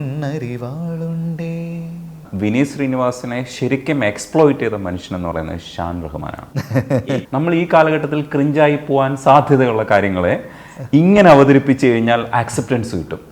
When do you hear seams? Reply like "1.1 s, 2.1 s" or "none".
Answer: 2.3 s, 7.0 s